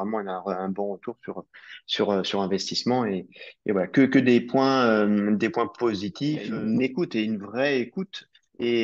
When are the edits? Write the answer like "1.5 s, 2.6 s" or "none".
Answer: 6.5 s